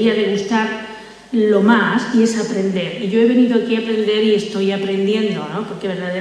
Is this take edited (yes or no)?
no